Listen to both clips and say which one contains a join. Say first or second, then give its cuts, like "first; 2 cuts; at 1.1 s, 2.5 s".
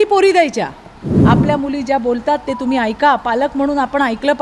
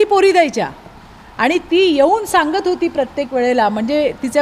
first; 1 cut; at 1.1 s